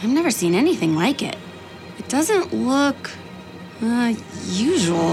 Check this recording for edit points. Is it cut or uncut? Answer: cut